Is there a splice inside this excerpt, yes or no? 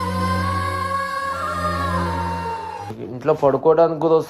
yes